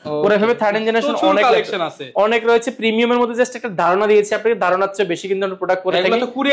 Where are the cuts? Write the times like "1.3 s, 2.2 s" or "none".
none